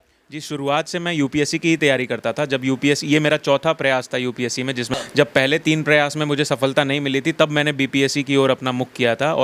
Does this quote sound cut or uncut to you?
cut